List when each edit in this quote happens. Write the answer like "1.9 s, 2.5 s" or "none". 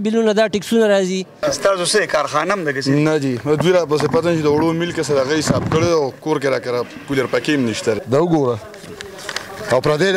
1.3 s, 8.0 s